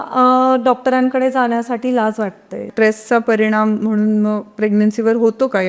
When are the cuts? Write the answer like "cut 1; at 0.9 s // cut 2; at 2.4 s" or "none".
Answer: cut 1; at 2.7 s